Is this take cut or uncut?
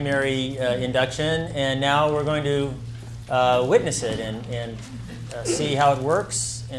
cut